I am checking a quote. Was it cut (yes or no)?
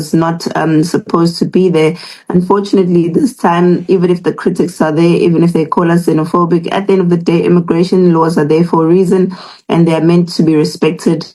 no